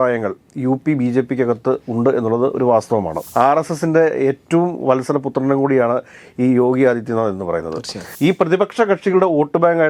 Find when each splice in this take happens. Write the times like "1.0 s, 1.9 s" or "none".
3.1 s, 8.1 s